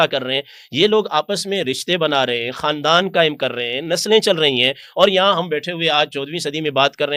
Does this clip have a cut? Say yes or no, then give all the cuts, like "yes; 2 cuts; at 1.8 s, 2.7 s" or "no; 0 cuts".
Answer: no; 0 cuts